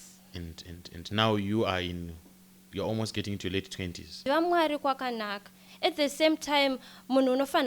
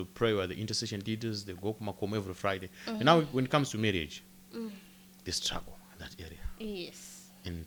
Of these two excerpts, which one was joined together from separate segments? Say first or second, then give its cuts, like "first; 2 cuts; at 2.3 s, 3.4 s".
first; 1 cut; at 4.2 s